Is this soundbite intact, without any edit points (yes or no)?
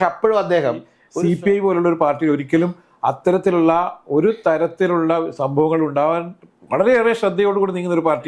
no